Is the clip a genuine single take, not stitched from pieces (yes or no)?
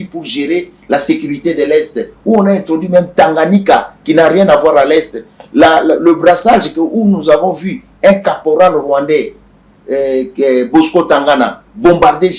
yes